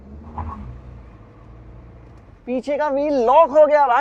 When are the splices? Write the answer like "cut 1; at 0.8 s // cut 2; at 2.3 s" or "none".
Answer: none